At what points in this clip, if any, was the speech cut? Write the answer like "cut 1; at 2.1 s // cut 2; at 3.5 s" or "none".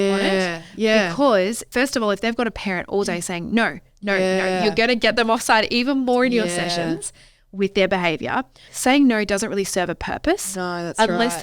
cut 1; at 1.7 s // cut 2; at 8.6 s